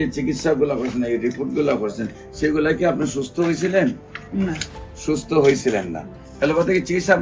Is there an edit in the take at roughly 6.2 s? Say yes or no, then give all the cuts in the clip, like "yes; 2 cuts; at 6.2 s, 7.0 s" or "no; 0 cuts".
yes; 1 cut; at 6.2 s